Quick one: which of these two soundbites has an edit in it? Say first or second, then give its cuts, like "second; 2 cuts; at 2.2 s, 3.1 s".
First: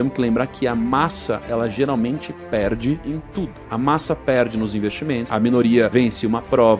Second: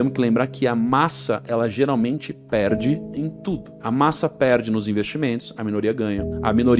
first; 3 cuts; at 3.3 s, 5.3 s, 5.9 s